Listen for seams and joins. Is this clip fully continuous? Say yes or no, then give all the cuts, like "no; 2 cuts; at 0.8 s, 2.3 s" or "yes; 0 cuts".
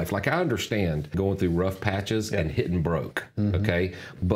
no; 1 cut; at 1.1 s